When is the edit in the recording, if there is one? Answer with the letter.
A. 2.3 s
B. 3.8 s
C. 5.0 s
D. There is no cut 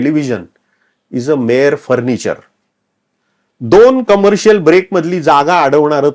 D